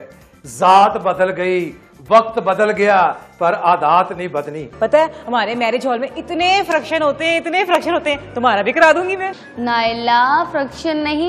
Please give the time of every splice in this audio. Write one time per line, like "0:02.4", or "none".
0:04.6

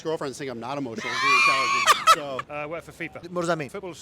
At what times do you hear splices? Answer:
0:02.4

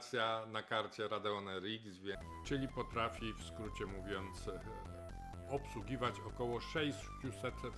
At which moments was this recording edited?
0:02.2

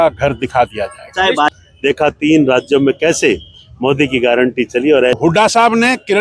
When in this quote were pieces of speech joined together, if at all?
0:01.6
0:05.1

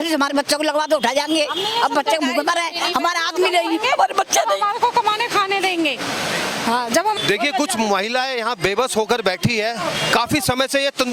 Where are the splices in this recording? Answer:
0:07.1

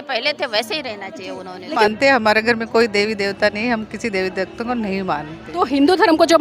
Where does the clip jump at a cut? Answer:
0:01.8

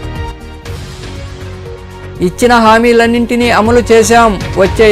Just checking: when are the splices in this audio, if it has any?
0:02.1

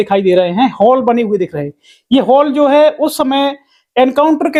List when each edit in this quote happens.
none

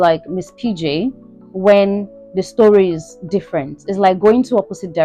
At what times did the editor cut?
none

